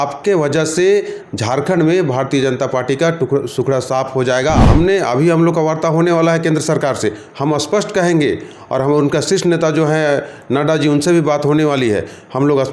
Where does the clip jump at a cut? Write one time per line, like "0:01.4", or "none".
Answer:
0:04.6